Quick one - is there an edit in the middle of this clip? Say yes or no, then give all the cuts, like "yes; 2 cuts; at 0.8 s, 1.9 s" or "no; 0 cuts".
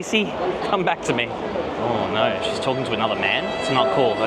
no; 0 cuts